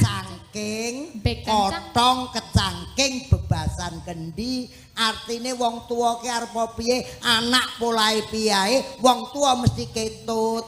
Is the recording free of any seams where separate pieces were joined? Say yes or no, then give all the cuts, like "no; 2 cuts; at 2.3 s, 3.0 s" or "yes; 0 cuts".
yes; 0 cuts